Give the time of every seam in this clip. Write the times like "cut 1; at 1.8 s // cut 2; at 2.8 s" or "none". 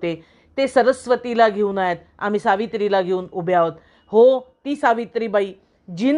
none